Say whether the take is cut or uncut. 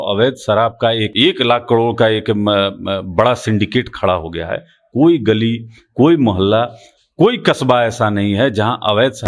cut